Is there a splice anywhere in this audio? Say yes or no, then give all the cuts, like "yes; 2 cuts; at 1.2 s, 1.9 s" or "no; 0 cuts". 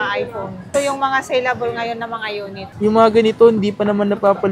yes; 1 cut; at 2.7 s